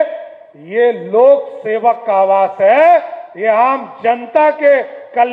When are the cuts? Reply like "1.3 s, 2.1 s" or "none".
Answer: none

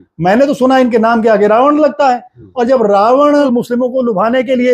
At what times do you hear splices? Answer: 3.5 s

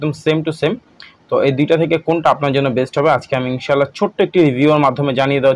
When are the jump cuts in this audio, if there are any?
none

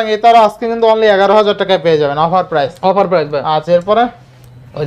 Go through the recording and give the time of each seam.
none

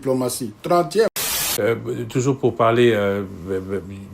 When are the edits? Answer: 1.3 s

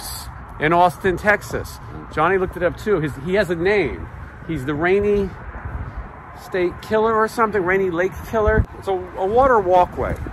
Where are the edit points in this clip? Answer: 8.7 s

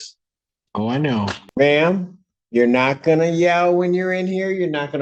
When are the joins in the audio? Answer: 1.4 s

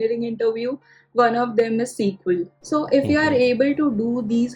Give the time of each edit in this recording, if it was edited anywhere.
2.6 s

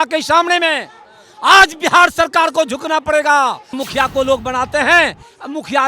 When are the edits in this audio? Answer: 3.7 s

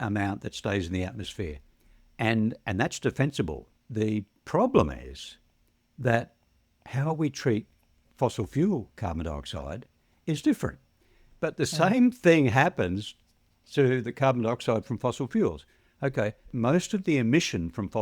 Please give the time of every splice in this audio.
3.8 s, 8.0 s, 16.5 s

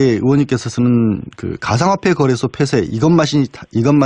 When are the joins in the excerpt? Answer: none

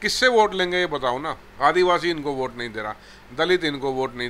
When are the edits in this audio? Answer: 1.4 s

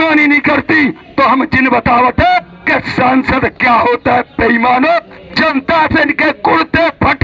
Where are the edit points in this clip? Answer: none

